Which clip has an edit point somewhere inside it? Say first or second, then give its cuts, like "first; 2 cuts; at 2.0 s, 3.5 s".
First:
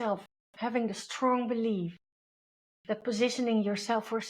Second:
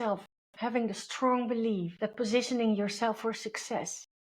second; 1 cut; at 1.9 s